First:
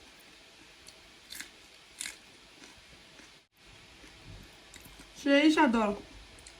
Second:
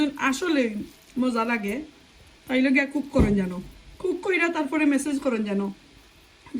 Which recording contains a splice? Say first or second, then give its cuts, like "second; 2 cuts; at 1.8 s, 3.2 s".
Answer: first; 1 cut; at 3.5 s